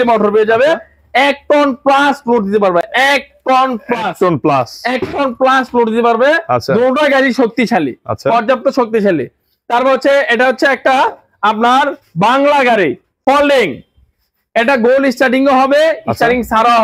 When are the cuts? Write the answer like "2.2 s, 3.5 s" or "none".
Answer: none